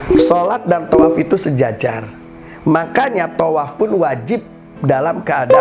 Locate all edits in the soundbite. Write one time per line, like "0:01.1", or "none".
none